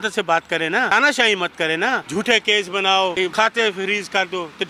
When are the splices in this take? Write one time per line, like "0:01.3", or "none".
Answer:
0:00.9
0:02.0
0:03.2